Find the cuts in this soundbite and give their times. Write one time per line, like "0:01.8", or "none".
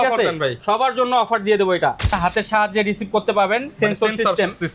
0:02.1